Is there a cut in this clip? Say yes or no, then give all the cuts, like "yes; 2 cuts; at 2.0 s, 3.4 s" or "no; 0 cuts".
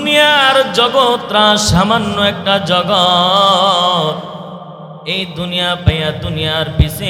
no; 0 cuts